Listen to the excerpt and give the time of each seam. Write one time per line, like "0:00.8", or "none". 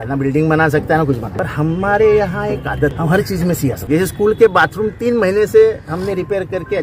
0:01.3
0:03.0
0:03.8